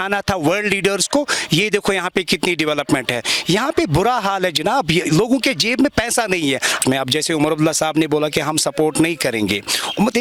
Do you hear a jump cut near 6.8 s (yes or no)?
yes